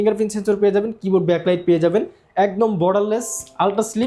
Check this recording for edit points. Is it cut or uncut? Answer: uncut